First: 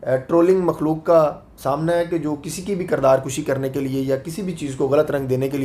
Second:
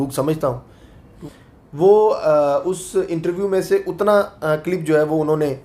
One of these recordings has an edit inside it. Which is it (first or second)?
second